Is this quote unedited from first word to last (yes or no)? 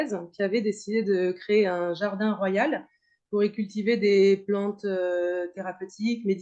yes